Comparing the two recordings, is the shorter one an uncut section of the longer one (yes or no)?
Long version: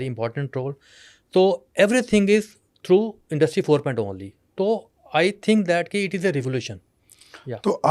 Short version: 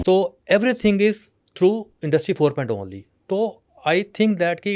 yes